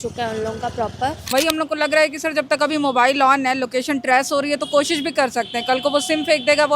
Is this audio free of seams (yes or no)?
no